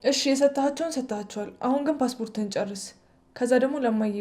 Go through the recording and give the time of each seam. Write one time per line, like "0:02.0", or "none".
none